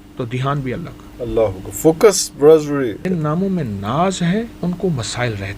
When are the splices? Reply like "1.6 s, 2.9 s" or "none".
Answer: 1.0 s, 3.0 s, 4.5 s